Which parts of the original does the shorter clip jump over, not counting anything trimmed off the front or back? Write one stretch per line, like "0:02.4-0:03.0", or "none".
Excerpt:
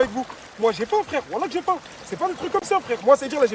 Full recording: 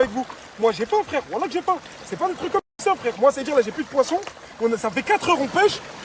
0:02.6-0:02.8